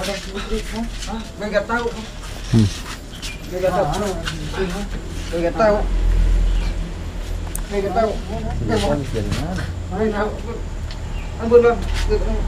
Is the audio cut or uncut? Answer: uncut